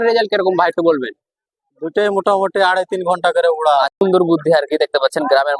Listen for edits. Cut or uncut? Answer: cut